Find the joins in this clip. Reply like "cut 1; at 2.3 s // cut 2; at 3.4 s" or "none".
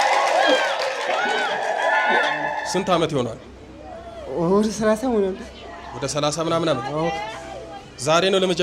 cut 1; at 2.3 s

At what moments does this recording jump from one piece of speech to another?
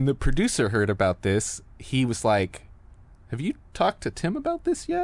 none

